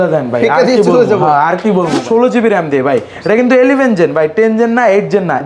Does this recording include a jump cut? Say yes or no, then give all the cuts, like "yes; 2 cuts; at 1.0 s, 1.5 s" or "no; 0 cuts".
yes; 1 cut; at 2.0 s